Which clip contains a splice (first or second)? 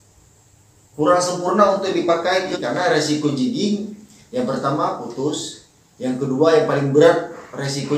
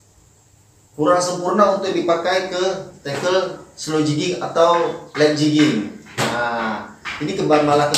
first